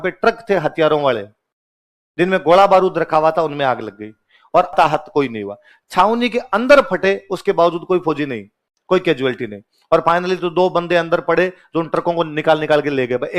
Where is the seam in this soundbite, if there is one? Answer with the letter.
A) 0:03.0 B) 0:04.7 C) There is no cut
B